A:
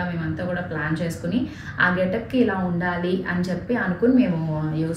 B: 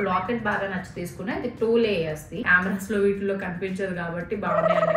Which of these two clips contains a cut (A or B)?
B